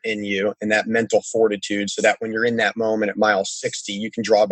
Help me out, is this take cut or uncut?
uncut